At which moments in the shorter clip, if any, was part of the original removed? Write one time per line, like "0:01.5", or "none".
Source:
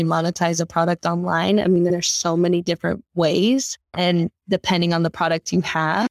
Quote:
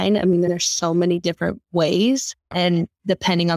none